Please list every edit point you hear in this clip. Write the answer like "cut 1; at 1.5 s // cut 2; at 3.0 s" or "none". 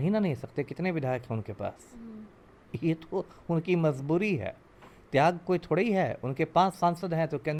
none